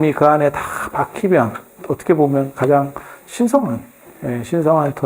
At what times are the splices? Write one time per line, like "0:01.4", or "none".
0:01.8